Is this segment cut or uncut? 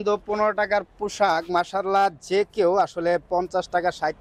uncut